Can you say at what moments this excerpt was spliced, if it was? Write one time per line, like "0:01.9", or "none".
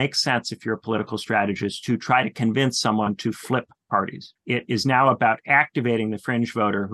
0:04.3